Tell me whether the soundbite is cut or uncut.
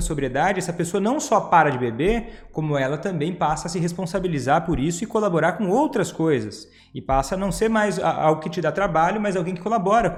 uncut